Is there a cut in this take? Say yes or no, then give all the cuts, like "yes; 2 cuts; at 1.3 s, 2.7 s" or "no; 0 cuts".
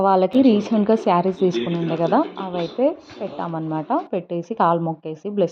no; 0 cuts